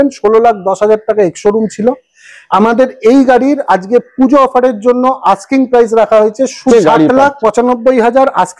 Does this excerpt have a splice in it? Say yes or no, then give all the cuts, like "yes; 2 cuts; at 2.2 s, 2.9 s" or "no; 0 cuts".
yes; 1 cut; at 6.6 s